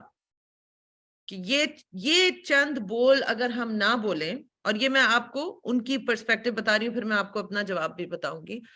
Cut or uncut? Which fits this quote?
uncut